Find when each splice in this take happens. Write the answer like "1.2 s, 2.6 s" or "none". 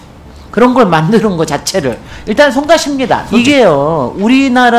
3.2 s